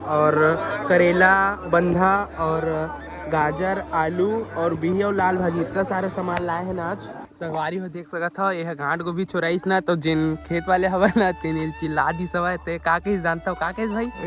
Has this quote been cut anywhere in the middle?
yes; 1 cut; at 7.3 s

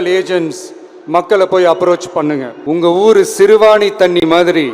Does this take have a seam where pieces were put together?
yes; 1 cut; at 2.5 s

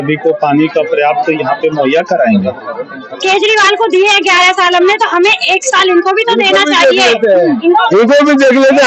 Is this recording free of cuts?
no; 1 cut; at 3.1 s

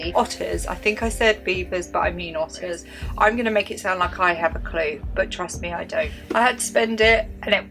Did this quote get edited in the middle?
yes; 2 cuts; at 2.9 s, 6.2 s

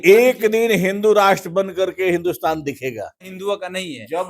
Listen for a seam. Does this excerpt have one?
yes; 1 cut; at 3.3 s

